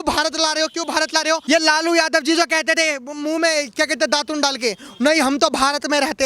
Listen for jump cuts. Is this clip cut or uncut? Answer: cut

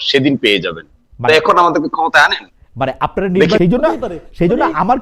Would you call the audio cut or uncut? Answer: cut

